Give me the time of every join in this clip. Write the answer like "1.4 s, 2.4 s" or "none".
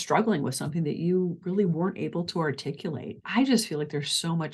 3.2 s